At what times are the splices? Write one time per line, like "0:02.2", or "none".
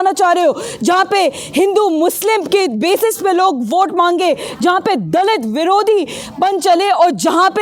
none